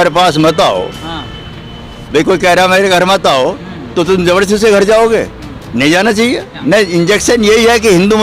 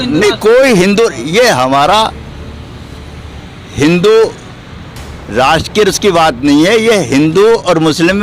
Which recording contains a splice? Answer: first; 1 cut; at 6.5 s

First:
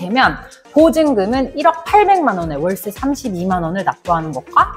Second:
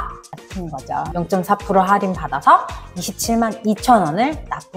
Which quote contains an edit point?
second; 1 cut; at 1.1 s

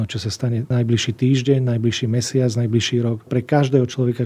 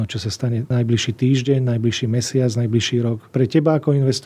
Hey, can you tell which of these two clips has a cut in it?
first; 1 cut; at 3.3 s

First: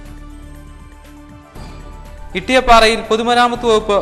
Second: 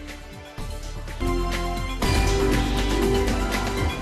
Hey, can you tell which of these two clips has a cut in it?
second; 1 cut; at 1.1 s

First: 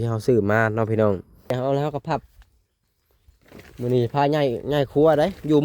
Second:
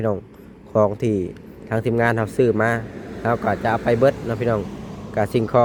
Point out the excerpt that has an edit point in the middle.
first; 1 cut; at 1.5 s

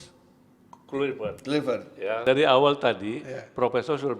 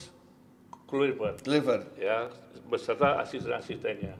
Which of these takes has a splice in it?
first; 1 cut; at 2.2 s

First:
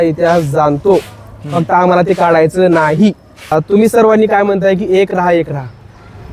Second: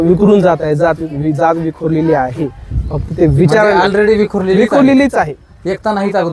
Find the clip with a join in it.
first; 1 cut; at 3.5 s

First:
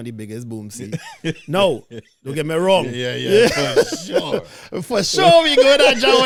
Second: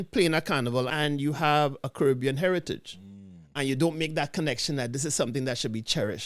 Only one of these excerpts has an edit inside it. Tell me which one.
second; 1 cut; at 0.9 s

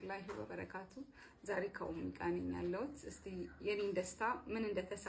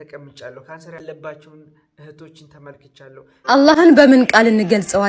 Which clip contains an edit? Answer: second; 2 cuts; at 1.0 s, 3.3 s

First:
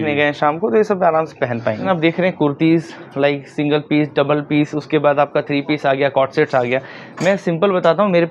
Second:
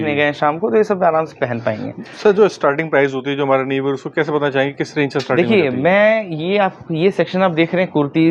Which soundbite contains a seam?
first; 1 cut; at 1.8 s

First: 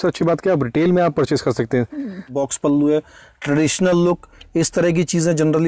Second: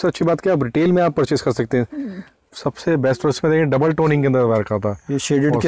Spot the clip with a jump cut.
first; 1 cut; at 2.3 s

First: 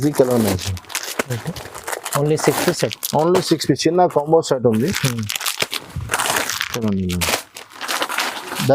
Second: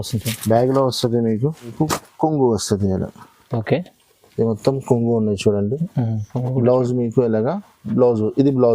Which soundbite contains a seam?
second; 1 cut; at 1.7 s

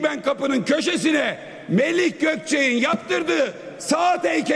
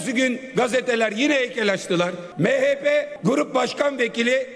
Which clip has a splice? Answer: second; 2 cuts; at 2.2 s, 3.1 s

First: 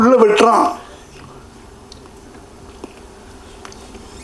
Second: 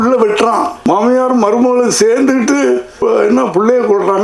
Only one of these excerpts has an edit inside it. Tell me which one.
second; 2 cuts; at 0.9 s, 3.0 s

